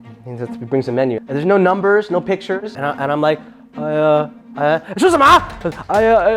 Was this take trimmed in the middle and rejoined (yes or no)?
no